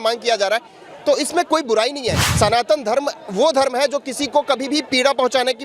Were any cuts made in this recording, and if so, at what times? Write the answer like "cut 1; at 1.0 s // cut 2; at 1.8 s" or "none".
cut 1; at 2.2 s